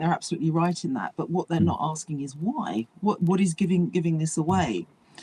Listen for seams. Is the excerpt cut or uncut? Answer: uncut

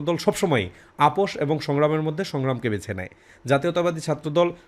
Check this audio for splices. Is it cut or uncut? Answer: uncut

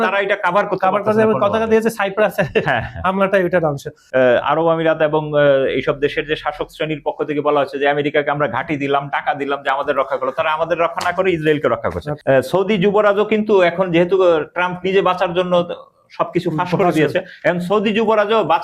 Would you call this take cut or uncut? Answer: cut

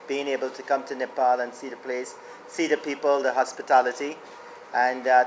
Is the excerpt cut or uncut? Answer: uncut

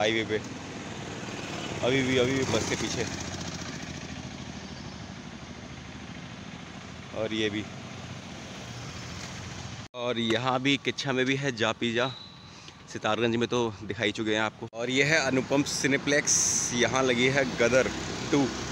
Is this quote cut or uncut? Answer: cut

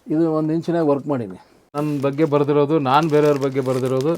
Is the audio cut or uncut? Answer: cut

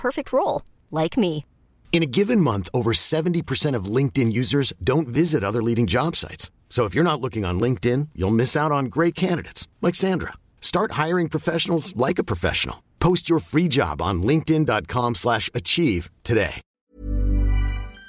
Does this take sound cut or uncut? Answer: cut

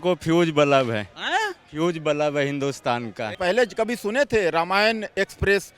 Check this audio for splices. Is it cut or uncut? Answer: cut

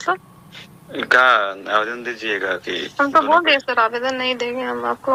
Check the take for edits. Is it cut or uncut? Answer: uncut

